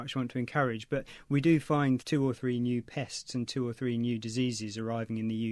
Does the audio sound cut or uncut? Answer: cut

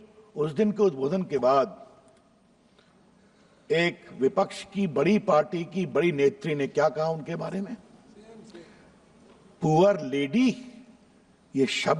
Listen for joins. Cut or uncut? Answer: uncut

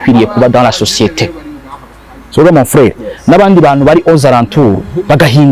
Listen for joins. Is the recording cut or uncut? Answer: uncut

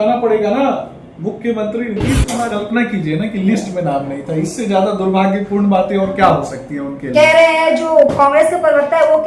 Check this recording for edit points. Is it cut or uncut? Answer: cut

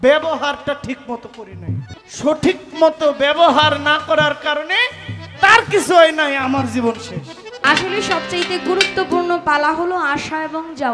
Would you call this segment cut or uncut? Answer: cut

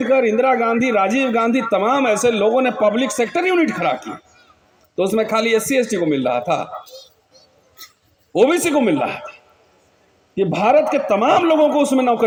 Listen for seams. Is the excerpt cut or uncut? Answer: uncut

